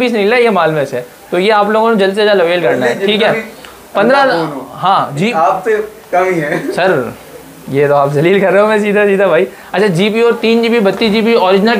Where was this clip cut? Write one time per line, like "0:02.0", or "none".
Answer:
none